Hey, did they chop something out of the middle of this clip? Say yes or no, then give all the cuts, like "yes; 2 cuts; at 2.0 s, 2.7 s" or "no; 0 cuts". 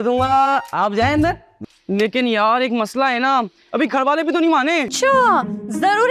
yes; 2 cuts; at 1.5 s, 4.9 s